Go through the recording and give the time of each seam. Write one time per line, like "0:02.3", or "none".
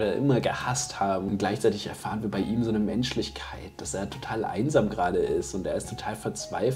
0:01.2